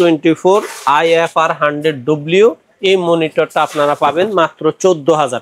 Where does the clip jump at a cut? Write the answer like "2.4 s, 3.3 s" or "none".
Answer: none